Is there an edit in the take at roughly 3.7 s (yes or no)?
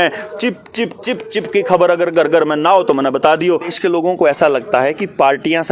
yes